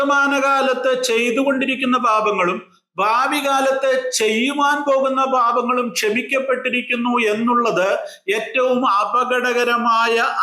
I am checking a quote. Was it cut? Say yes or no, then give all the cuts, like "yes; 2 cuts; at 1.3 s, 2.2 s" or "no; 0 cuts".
no; 0 cuts